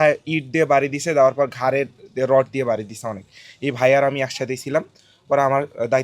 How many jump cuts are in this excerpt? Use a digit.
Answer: 0